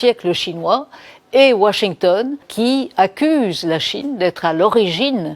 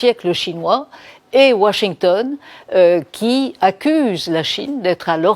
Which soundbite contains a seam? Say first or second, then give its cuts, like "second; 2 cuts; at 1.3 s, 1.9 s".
first; 1 cut; at 2.5 s